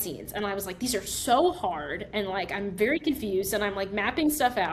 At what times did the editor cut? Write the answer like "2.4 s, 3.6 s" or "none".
none